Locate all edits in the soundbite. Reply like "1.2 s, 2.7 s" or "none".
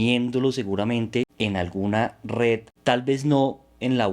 1.3 s, 2.7 s